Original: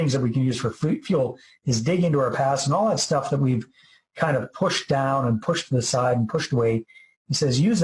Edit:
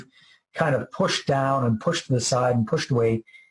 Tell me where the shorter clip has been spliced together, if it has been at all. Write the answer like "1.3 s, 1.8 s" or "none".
none